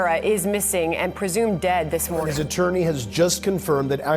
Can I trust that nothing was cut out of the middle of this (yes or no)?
no